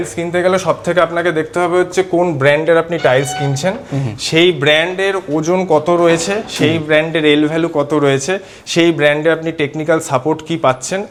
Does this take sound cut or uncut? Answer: uncut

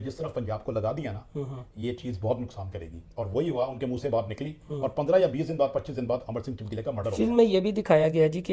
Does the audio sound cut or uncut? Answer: uncut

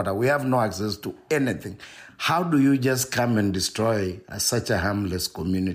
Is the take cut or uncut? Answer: uncut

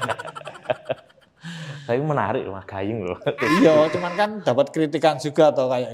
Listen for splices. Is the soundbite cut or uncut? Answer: uncut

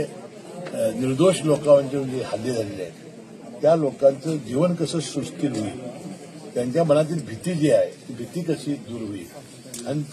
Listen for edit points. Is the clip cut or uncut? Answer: uncut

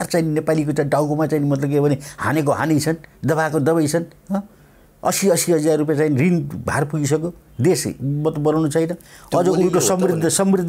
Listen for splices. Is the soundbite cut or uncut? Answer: uncut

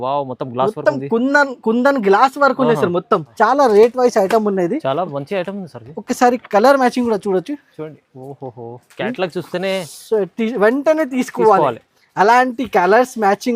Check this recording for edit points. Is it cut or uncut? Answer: cut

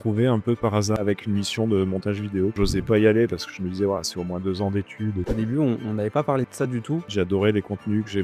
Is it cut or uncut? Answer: cut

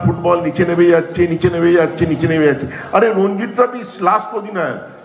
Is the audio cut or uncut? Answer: uncut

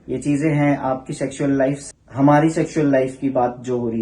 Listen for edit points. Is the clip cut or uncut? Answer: cut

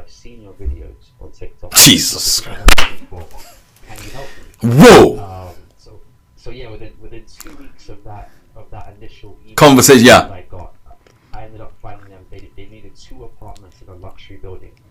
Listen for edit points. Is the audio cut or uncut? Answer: uncut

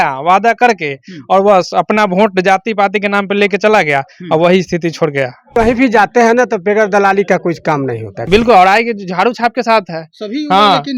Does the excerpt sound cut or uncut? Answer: cut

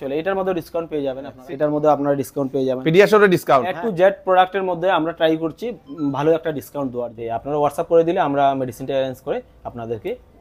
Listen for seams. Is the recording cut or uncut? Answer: cut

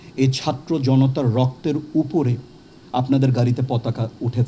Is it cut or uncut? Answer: uncut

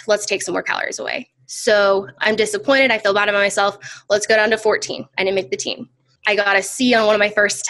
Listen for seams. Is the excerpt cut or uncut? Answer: cut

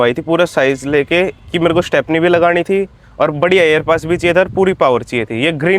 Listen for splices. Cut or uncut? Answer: uncut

